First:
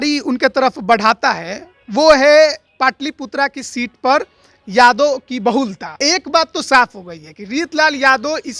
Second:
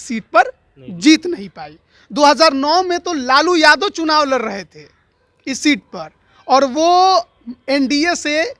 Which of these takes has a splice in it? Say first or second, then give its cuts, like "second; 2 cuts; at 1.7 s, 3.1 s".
first; 1 cut; at 6.0 s